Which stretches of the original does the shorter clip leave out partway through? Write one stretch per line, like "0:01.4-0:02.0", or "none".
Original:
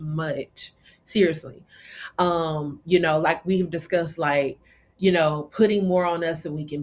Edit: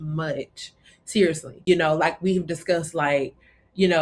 0:01.5-0:02.8